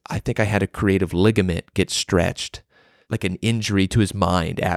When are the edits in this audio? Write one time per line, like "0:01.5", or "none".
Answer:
0:03.0